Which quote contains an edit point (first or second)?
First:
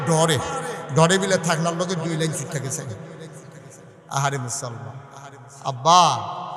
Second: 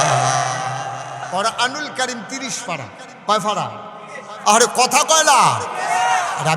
second